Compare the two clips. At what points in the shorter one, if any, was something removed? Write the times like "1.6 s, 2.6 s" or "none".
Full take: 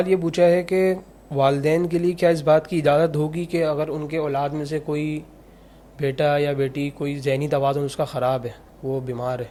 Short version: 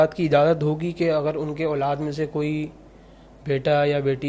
none